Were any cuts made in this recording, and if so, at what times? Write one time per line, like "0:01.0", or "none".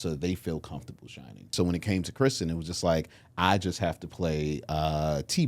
0:01.5